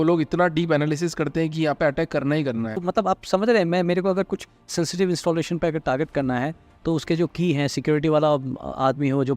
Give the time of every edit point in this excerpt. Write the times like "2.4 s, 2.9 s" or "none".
2.8 s